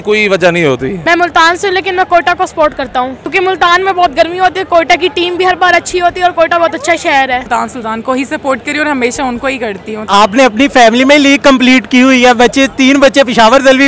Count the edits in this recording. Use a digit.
4